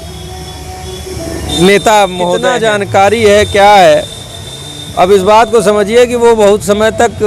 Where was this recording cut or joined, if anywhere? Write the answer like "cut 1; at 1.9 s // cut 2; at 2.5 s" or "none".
cut 1; at 2.5 s

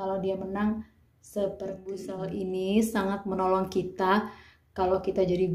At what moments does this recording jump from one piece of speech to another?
cut 1; at 2.1 s

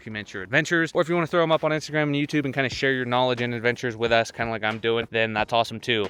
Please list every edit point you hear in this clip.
none

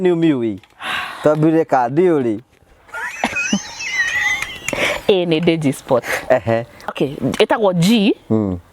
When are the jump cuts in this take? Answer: cut 1; at 6.9 s

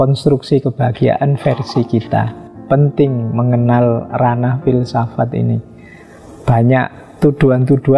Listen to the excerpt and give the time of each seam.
cut 1; at 2.6 s

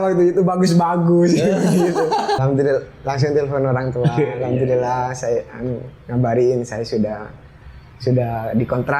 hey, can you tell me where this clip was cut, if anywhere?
cut 1; at 2.4 s

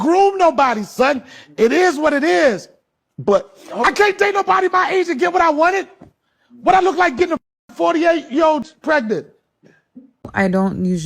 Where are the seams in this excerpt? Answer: cut 1; at 8.7 s // cut 2; at 10.3 s

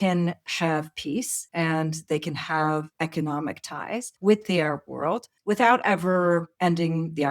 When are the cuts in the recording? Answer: cut 1; at 1.4 s // cut 2; at 2.9 s // cut 3; at 4.1 s // cut 4; at 5.3 s // cut 5; at 6.5 s

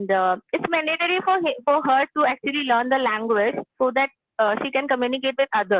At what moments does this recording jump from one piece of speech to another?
none

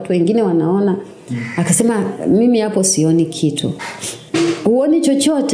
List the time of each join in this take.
cut 1; at 4.2 s

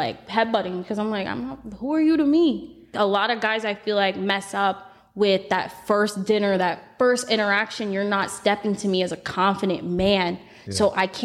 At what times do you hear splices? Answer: cut 1; at 2.9 s

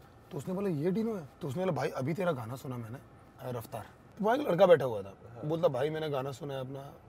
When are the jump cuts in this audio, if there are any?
cut 1; at 4.0 s

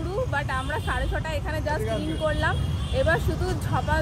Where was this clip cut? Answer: none

